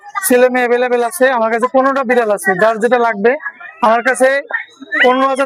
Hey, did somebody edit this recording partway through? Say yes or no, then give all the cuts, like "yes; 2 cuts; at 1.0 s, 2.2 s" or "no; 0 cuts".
no; 0 cuts